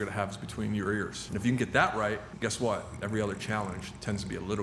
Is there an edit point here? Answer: yes; 2 cuts; at 1.2 s, 2.3 s

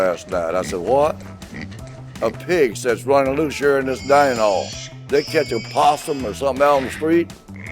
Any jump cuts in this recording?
yes; 1 cut; at 4.9 s

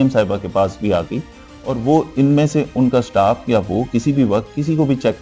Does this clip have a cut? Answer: no; 0 cuts

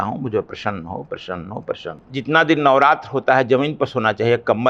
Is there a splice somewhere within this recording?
yes; 1 cut; at 2.0 s

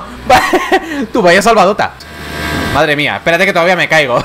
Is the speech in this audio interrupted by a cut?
yes; 1 cut; at 2.0 s

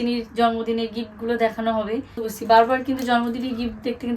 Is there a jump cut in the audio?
yes; 1 cut; at 2.3 s

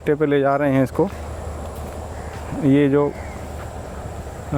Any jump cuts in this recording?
no; 0 cuts

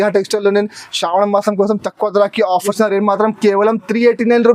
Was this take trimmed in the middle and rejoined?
yes; 1 cut; at 2.7 s

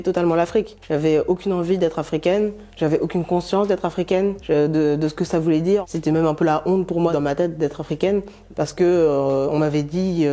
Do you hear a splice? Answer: no; 0 cuts

